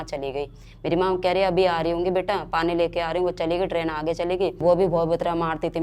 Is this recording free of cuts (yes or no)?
no